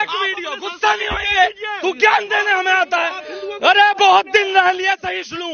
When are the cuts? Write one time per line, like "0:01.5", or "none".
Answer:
none